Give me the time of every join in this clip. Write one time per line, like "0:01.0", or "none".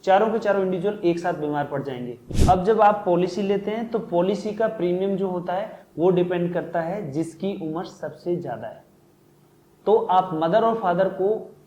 0:02.3